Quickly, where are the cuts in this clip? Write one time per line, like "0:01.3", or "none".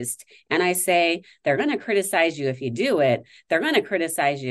none